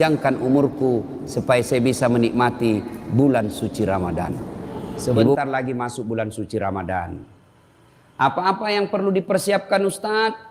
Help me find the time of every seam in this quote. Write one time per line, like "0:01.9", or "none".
0:05.4